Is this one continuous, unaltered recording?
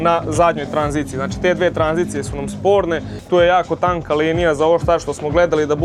yes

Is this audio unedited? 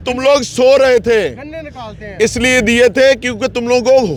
yes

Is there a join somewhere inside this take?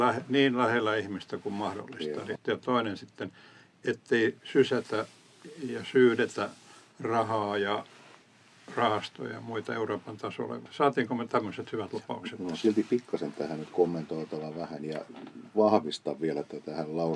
yes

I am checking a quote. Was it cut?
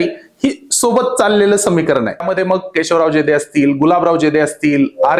yes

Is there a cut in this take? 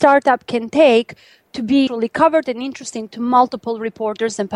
yes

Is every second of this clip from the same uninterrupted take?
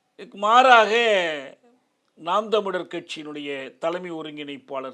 yes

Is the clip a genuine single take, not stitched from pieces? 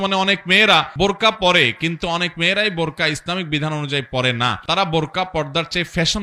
yes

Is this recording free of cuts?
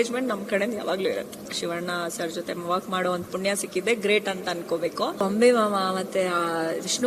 no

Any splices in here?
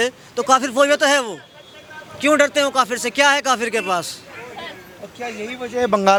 no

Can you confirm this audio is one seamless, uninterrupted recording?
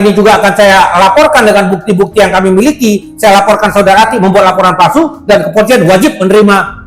yes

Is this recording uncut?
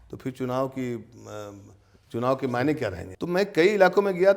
no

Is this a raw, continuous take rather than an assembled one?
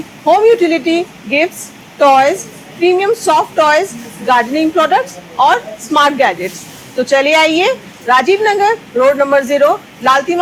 yes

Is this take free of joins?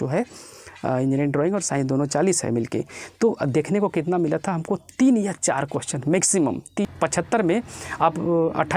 no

